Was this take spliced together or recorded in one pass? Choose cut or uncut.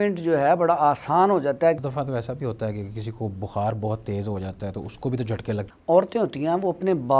cut